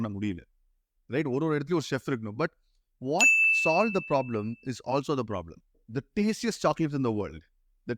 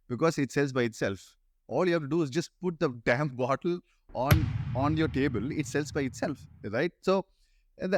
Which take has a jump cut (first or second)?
first